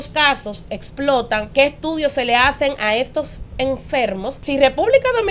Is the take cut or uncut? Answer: cut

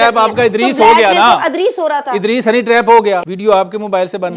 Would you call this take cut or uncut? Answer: cut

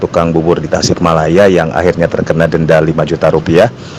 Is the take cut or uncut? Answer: uncut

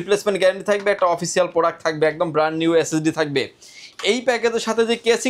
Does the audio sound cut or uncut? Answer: uncut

